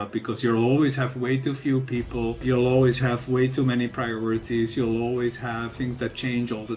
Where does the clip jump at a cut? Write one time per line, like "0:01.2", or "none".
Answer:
0:02.4
0:05.7

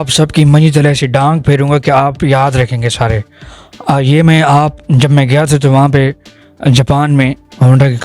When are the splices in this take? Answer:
none

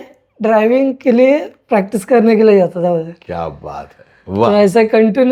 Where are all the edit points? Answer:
none

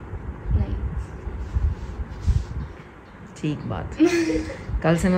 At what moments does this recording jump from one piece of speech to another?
none

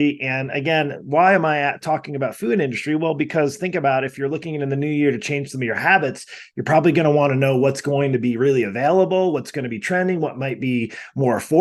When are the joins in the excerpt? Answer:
none

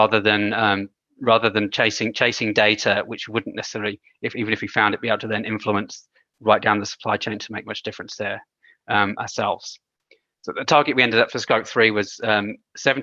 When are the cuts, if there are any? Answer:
none

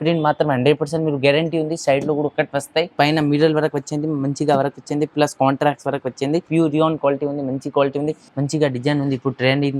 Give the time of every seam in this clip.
0:02.9
0:06.5
0:08.2

